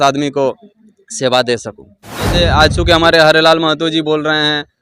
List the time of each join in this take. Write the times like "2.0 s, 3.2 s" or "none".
2.3 s